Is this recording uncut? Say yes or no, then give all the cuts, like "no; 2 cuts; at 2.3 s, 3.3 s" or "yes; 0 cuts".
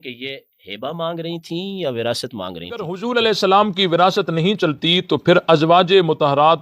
no; 1 cut; at 2.9 s